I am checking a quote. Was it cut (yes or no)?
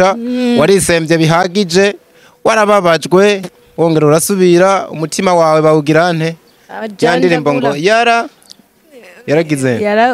no